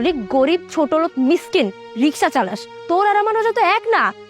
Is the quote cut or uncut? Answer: cut